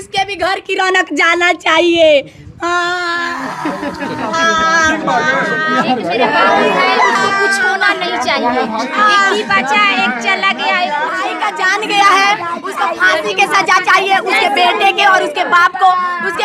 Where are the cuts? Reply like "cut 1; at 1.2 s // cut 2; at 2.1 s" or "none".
cut 1; at 11.3 s

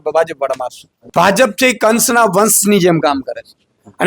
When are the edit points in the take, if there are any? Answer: cut 1; at 1.0 s

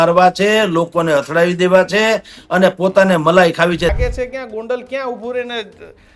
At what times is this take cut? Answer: cut 1; at 3.9 s

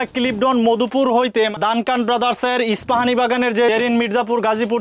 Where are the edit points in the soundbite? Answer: cut 1; at 1.6 s // cut 2; at 3.7 s

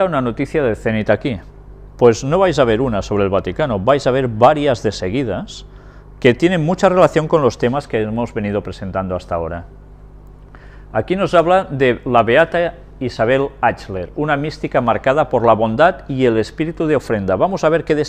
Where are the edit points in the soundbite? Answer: cut 1; at 14.0 s

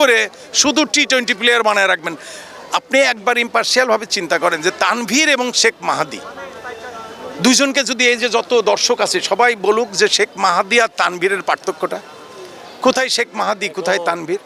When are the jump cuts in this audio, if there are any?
none

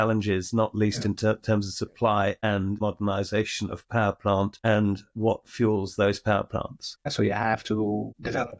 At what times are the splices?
cut 1; at 2.8 s // cut 2; at 7.1 s

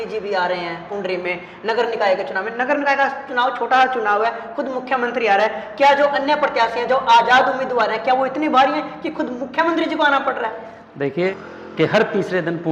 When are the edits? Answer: cut 1; at 11.3 s

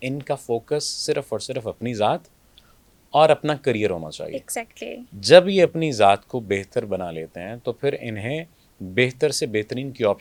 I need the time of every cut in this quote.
none

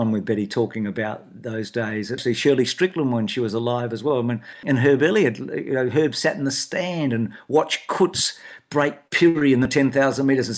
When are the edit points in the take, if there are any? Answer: cut 1; at 2.2 s // cut 2; at 4.5 s

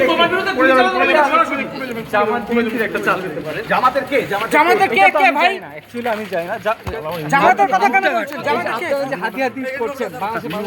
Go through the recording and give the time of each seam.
none

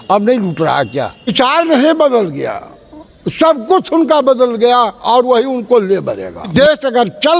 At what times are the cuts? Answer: cut 1; at 1.3 s // cut 2; at 6.5 s

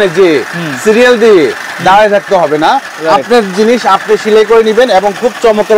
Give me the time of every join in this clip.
none

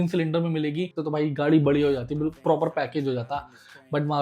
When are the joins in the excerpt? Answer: cut 1; at 1.0 s

